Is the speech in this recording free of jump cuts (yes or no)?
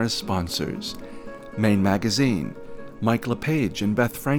yes